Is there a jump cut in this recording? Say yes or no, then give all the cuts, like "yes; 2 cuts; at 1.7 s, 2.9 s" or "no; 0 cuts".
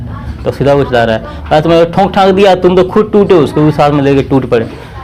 no; 0 cuts